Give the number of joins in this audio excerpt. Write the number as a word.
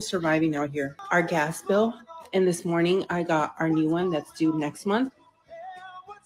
one